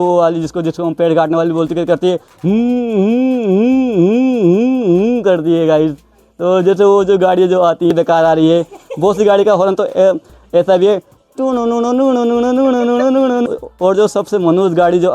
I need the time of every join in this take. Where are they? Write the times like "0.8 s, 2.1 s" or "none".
7.9 s, 13.5 s